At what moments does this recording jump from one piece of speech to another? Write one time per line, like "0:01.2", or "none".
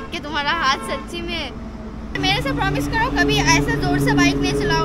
0:02.1